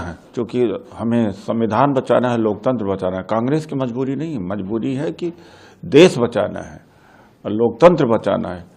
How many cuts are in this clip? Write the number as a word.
zero